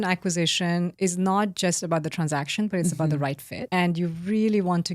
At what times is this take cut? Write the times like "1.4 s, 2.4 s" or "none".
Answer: 0.9 s, 3.5 s